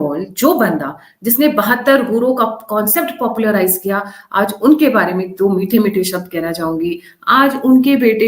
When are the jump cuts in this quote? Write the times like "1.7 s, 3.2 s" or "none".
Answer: none